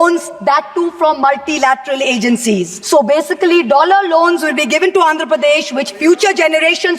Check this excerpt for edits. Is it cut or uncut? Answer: cut